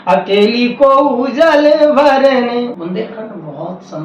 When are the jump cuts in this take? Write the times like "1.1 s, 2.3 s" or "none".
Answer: 2.8 s